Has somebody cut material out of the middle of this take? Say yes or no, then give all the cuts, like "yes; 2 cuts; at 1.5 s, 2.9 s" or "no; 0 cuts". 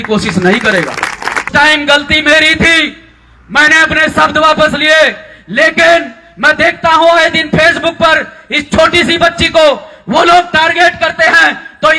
yes; 1 cut; at 1.5 s